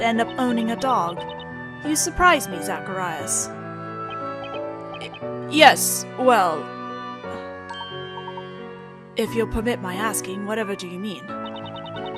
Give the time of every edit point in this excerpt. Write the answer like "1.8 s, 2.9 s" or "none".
3.1 s